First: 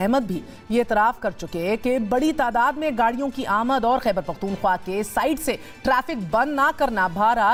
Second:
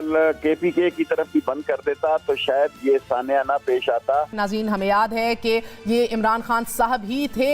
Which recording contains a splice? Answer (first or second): second